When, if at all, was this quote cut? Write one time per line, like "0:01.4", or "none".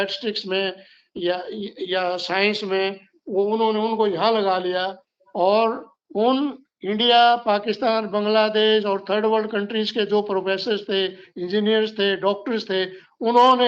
none